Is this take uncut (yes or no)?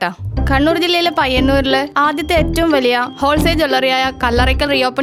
yes